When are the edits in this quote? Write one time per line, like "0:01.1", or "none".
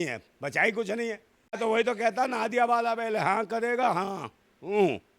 0:01.6